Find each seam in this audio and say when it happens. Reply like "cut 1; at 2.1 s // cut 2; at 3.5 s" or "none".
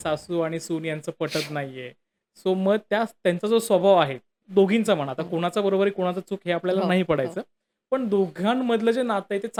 none